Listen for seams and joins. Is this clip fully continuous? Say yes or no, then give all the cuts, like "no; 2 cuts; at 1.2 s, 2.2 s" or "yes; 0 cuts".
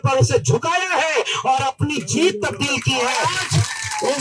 no; 1 cut; at 3.2 s